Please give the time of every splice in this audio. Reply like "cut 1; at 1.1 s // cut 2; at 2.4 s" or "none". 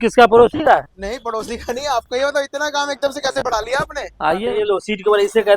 cut 1; at 4.5 s